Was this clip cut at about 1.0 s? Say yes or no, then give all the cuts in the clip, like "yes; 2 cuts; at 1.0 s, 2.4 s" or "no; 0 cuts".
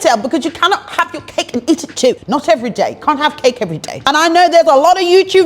no; 2 cuts; at 2.2 s, 4.0 s